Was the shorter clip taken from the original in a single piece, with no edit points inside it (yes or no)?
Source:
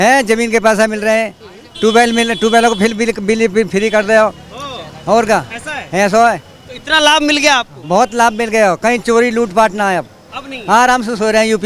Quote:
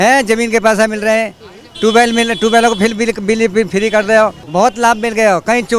no